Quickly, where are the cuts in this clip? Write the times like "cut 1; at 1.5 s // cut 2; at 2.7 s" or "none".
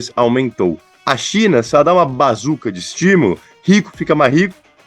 cut 1; at 0.9 s